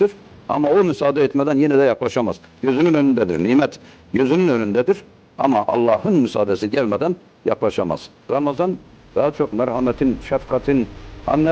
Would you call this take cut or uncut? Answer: cut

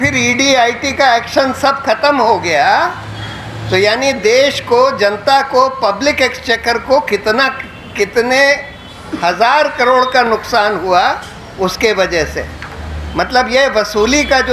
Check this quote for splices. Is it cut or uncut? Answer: uncut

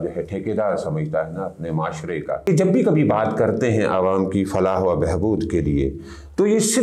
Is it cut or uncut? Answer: cut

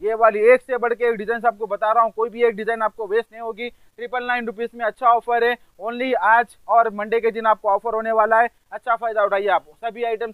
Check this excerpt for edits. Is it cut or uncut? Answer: uncut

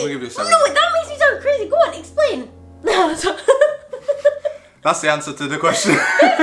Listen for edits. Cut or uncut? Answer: uncut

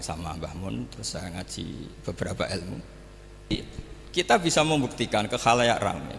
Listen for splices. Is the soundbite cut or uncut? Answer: cut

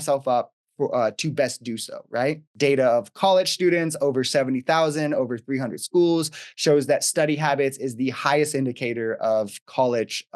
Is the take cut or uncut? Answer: cut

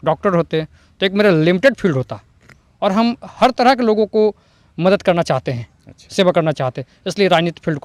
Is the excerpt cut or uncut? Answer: uncut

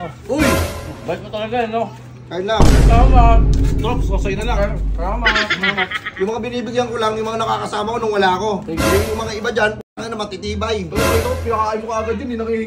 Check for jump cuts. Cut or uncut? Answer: uncut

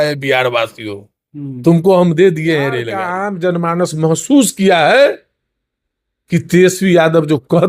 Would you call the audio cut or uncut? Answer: cut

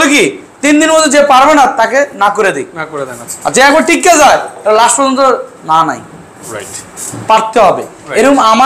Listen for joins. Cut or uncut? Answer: uncut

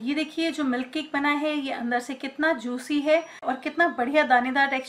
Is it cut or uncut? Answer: cut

